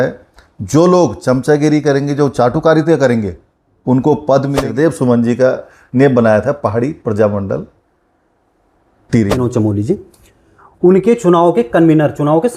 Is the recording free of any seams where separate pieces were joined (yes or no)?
no